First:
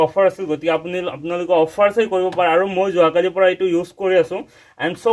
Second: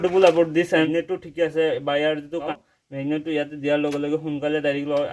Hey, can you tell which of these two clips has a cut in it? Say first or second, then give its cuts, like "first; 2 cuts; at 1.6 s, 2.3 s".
second; 2 cuts; at 0.9 s, 2.5 s